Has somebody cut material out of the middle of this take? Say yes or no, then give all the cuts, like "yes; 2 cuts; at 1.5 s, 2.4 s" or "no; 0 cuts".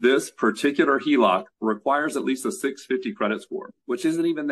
no; 0 cuts